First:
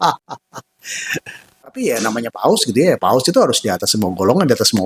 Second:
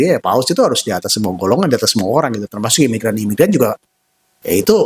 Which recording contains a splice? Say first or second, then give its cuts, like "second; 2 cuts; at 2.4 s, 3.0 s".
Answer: first; 1 cut; at 1.6 s